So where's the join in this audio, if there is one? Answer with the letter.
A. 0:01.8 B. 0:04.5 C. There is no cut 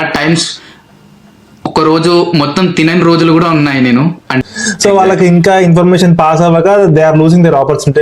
B